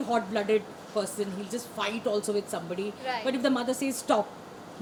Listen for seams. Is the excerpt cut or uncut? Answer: uncut